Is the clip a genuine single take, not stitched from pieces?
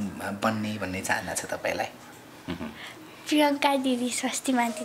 yes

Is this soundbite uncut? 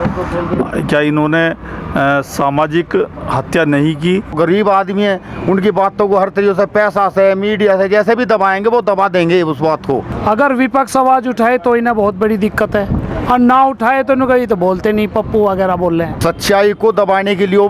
no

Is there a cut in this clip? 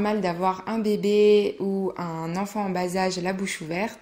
no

